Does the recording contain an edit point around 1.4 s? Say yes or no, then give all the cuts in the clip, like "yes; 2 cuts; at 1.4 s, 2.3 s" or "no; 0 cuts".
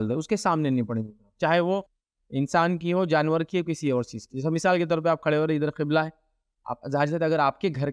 no; 0 cuts